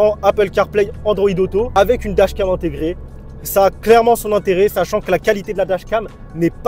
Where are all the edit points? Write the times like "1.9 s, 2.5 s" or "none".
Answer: 1.7 s